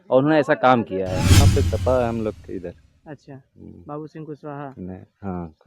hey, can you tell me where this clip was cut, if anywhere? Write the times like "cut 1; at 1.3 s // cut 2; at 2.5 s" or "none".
cut 1; at 1.5 s